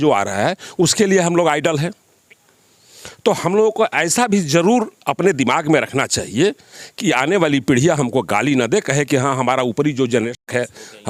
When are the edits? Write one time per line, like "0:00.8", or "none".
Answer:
none